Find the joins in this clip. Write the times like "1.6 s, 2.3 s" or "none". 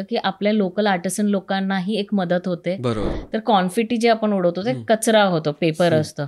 3.1 s